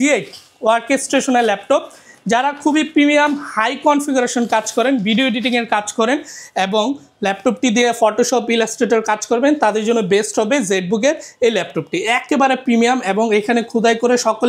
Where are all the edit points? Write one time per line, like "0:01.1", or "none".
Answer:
none